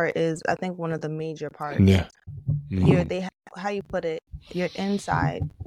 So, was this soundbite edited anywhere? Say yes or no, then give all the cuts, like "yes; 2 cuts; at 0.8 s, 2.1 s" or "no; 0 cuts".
no; 0 cuts